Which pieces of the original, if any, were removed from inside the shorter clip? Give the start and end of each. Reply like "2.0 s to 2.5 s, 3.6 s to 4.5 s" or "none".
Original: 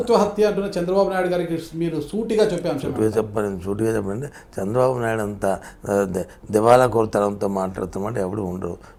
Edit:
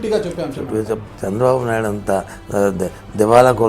3.3 s to 4.4 s